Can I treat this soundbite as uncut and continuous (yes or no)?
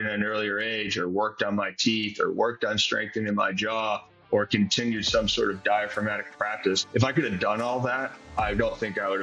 no